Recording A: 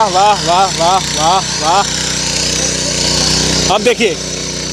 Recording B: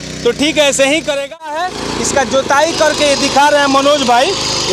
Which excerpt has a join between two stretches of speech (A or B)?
B